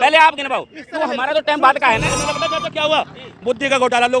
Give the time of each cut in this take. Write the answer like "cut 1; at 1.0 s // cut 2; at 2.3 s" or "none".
cut 1; at 2.2 s